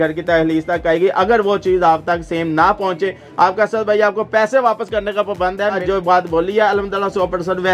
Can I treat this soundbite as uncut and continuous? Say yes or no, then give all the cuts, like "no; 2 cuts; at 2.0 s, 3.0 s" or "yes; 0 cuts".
no; 1 cut; at 5.8 s